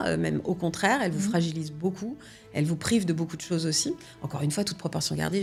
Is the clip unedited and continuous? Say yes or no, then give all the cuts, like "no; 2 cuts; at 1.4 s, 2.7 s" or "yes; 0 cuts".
yes; 0 cuts